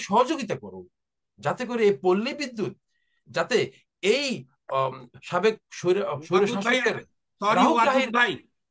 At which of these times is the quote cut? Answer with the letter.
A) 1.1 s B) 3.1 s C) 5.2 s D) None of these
D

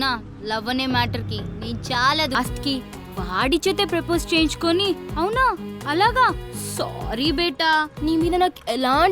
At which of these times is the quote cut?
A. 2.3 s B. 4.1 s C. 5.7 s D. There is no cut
A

